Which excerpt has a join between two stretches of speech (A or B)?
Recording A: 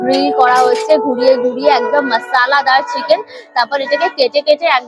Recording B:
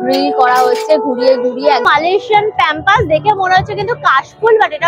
B